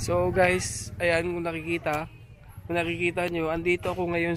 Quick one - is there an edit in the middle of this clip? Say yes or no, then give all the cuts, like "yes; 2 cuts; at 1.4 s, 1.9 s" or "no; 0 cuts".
no; 0 cuts